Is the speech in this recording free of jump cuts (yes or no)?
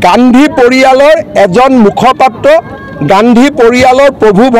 yes